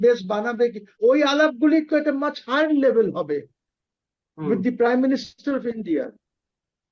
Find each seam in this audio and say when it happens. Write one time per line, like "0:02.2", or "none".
0:01.0